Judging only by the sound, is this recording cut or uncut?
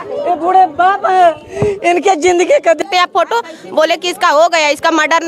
cut